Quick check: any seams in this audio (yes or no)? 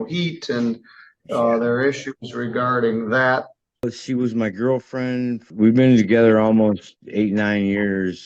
yes